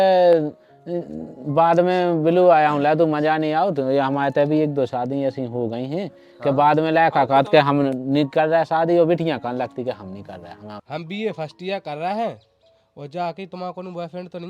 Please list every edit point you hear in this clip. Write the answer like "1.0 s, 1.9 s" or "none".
10.7 s